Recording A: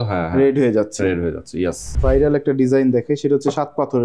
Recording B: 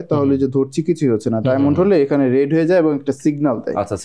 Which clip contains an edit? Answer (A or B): A